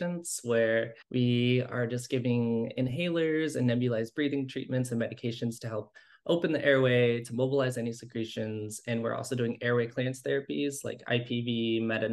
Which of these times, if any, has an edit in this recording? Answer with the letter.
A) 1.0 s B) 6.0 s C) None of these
A